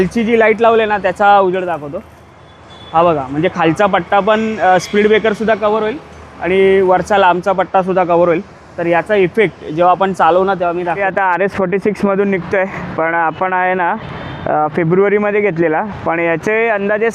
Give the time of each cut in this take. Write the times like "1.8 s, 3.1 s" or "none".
11.0 s